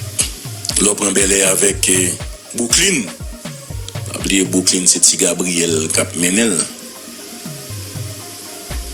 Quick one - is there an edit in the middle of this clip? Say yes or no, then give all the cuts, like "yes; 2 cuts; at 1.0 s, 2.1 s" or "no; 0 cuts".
no; 0 cuts